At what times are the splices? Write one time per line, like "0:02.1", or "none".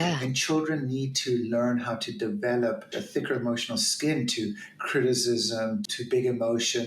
0:03.0
0:05.9

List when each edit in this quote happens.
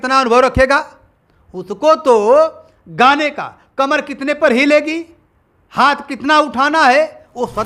none

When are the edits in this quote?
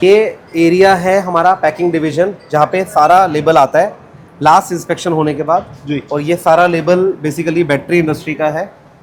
none

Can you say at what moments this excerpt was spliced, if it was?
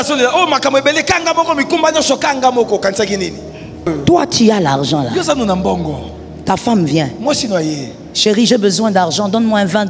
0:03.9

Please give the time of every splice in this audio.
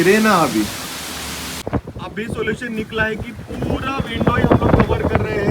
0:01.6

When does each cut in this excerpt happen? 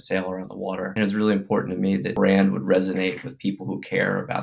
0:00.9
0:02.1

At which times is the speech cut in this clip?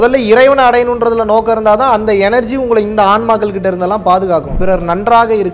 0:04.5

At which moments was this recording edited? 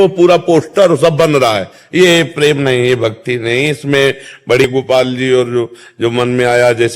0:04.7

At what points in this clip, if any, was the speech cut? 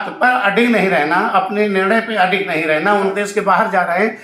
0:03.1

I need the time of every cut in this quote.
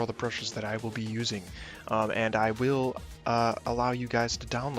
0:02.6

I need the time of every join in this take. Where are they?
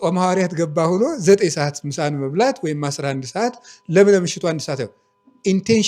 none

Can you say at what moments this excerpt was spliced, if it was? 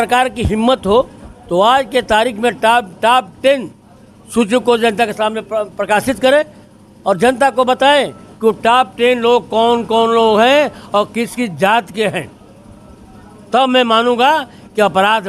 none

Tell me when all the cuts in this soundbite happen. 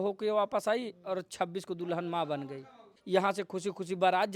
0:02.9

